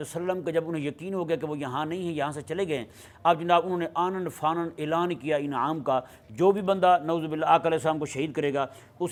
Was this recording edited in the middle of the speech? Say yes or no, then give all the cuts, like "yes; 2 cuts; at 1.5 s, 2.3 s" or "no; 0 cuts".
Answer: no; 0 cuts